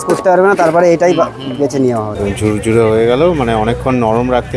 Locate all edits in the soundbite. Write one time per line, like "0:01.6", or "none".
0:02.2